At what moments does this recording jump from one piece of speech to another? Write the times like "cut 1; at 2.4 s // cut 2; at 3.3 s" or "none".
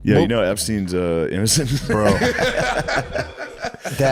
none